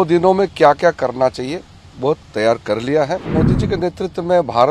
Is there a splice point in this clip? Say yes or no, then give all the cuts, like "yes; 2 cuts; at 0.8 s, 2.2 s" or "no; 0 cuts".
yes; 1 cut; at 3.3 s